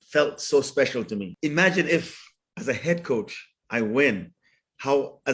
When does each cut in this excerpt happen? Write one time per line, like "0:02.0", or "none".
0:01.3